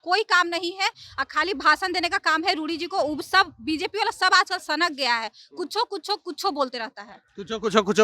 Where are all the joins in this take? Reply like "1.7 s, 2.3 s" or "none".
none

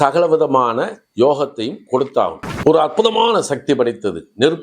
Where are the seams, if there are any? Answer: 2.4 s

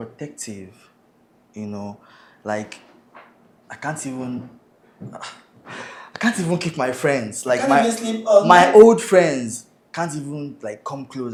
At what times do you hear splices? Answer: none

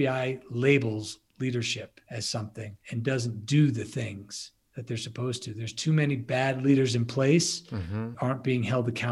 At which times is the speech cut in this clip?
2.0 s, 2.8 s

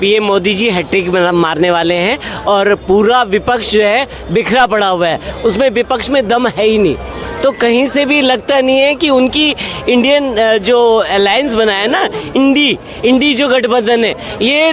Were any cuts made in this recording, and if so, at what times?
none

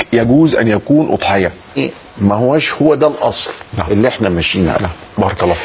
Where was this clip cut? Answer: 1.8 s

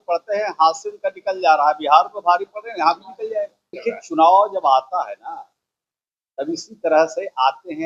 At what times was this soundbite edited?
3.7 s

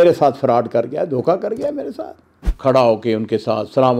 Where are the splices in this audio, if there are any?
2.5 s

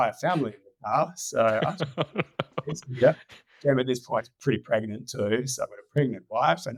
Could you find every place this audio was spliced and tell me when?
none

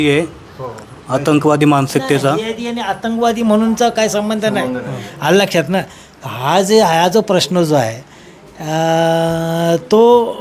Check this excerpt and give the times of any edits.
none

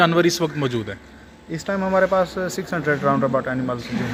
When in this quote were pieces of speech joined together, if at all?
none

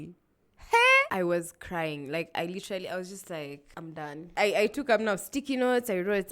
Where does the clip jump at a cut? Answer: 1.1 s, 4.3 s

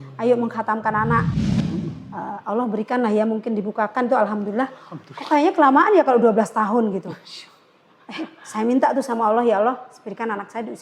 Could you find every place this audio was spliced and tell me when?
1.4 s

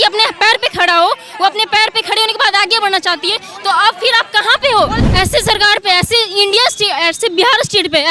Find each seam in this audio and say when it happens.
5.0 s

